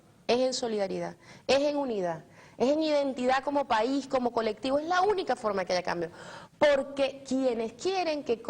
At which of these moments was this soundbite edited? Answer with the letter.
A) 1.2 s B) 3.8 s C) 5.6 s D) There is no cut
B